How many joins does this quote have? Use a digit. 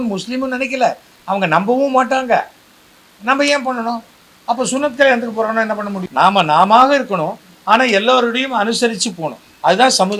1